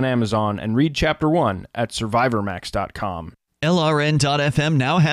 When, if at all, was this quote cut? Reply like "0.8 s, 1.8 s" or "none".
3.3 s